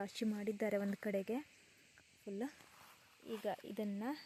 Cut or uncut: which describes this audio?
uncut